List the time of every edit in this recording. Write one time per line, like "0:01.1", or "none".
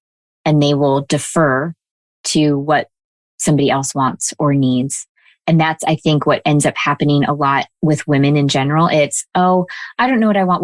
none

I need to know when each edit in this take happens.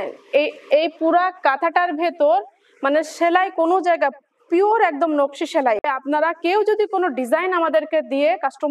0:05.9

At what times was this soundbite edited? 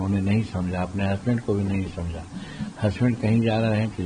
none

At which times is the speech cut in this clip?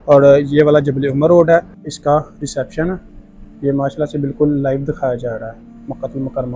0:01.9

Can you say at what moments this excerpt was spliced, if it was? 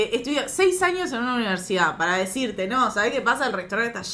none

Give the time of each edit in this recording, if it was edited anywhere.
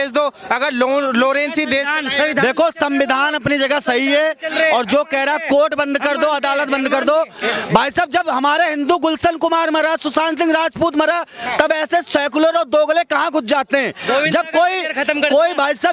none

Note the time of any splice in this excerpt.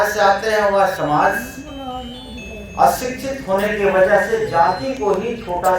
none

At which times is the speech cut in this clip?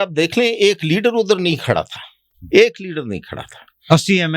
none

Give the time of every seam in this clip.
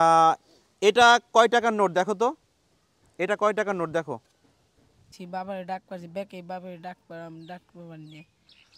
0:05.1

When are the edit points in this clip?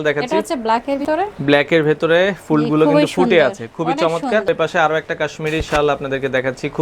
0:01.0
0:04.5

